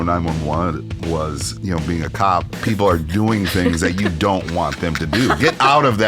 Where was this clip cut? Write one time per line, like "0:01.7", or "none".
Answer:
0:01.5
0:02.5